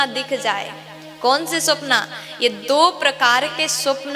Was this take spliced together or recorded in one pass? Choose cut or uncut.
uncut